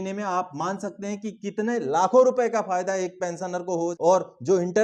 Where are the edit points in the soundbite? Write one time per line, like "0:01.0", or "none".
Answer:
0:03.9